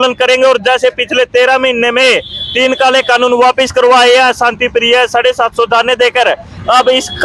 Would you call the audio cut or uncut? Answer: uncut